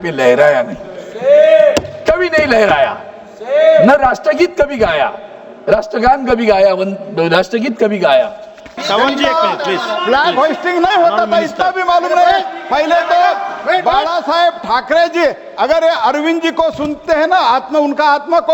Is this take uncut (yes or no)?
no